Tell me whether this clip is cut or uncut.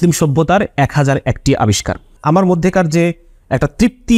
uncut